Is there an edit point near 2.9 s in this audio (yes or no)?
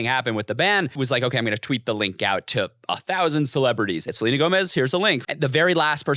no